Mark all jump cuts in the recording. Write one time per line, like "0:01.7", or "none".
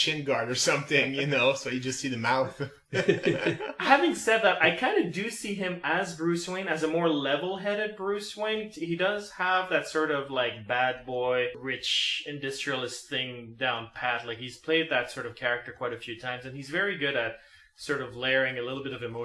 none